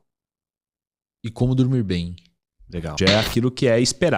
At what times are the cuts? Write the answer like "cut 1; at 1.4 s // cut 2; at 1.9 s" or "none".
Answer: cut 1; at 3.0 s